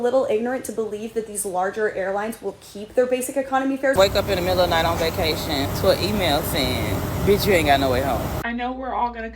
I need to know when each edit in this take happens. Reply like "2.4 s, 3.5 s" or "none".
4.0 s, 5.7 s, 7.1 s, 8.4 s